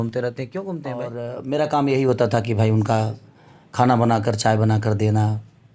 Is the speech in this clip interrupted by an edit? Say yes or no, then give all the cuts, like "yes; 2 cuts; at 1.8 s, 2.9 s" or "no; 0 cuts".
yes; 1 cut; at 1.2 s